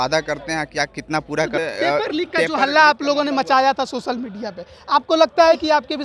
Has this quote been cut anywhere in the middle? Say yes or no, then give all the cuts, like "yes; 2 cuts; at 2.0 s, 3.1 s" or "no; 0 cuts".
yes; 1 cut; at 1.6 s